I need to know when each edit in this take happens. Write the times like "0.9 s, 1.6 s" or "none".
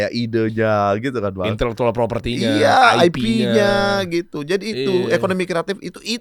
none